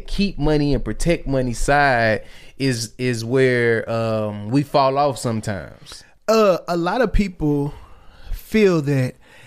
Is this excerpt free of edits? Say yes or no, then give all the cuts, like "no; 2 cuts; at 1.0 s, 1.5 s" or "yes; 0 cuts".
yes; 0 cuts